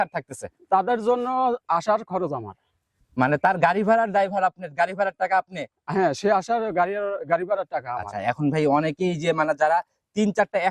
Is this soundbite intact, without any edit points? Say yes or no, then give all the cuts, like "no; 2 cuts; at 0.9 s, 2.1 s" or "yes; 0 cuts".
yes; 0 cuts